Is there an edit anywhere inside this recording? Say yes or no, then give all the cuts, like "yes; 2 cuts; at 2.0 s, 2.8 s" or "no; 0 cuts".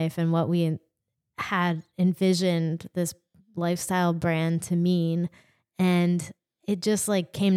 no; 0 cuts